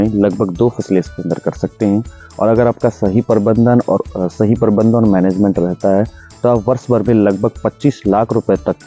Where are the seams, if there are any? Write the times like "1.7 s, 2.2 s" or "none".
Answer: none